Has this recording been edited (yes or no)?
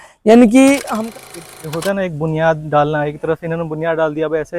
yes